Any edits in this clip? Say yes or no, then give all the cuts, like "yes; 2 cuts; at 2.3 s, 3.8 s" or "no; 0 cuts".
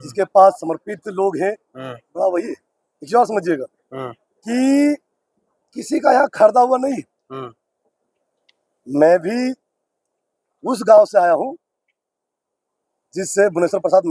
no; 0 cuts